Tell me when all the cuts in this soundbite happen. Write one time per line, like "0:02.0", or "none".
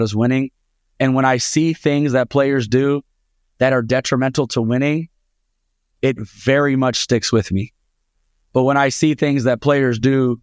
none

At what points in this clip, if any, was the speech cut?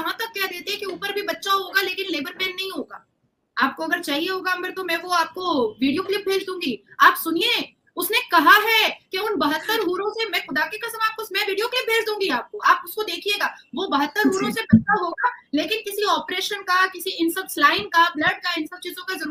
none

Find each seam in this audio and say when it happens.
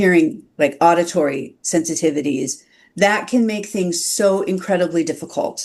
none

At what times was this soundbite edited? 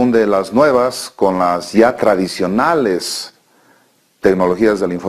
0:00.9

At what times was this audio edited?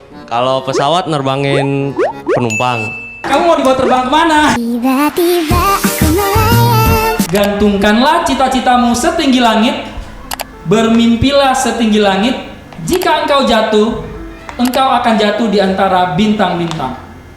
0:03.3
0:07.3

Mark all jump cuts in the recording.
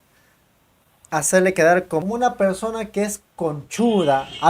0:02.0

